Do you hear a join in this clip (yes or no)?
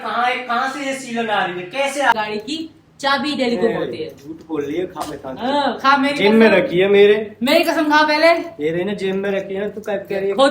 yes